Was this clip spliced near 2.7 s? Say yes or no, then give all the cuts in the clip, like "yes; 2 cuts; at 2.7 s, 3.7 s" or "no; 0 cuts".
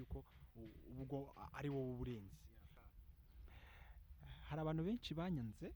yes; 1 cut; at 2.7 s